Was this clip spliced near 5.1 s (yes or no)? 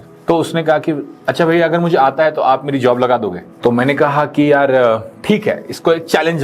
no